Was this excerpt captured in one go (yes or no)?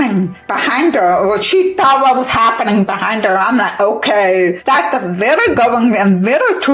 no